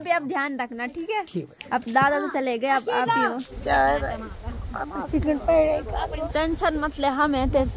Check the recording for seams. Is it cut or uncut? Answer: cut